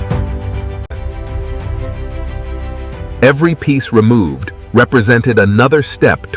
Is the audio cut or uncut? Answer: cut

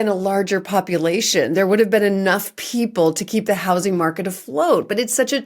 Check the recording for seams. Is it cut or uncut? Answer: uncut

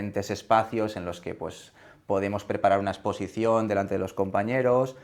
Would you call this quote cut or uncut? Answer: uncut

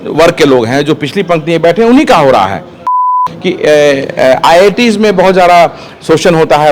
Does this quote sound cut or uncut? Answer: cut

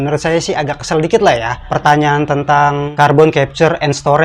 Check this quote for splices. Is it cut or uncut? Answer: cut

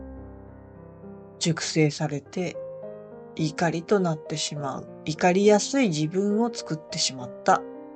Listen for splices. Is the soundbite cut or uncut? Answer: cut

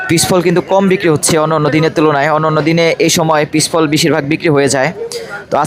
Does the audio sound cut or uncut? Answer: uncut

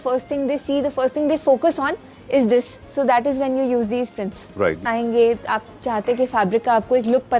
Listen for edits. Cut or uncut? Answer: cut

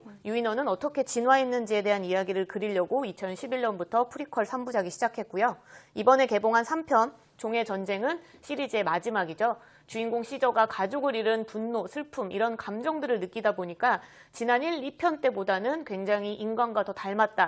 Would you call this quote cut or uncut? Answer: uncut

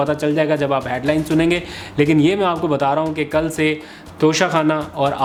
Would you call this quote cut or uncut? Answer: uncut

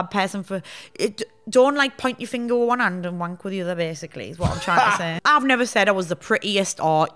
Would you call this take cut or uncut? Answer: cut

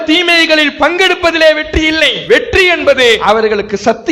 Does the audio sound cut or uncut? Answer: cut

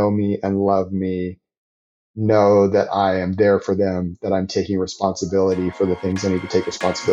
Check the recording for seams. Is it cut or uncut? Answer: uncut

